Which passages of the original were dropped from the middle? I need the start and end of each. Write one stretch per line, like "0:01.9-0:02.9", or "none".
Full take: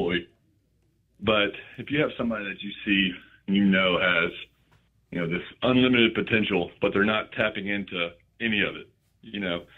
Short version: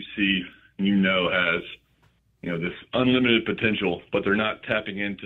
none